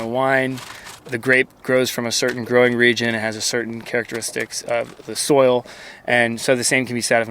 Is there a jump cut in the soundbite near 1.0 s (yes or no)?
yes